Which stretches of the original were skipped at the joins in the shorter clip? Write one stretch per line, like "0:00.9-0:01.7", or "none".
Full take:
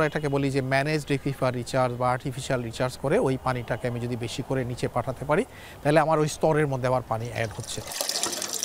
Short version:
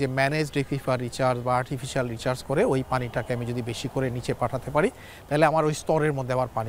none